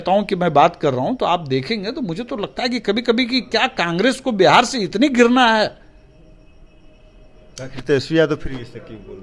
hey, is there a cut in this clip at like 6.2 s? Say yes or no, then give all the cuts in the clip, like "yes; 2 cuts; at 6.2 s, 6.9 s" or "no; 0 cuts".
no; 0 cuts